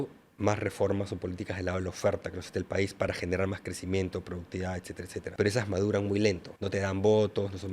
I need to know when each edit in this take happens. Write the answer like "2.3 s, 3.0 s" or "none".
5.3 s, 6.5 s